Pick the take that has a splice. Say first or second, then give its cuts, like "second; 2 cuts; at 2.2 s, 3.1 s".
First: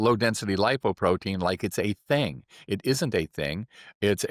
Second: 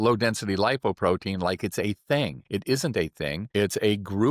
second; 2 cuts; at 2.4 s, 3.4 s